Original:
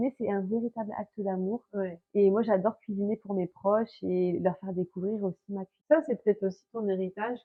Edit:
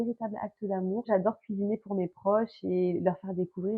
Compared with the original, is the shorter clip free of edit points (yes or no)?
no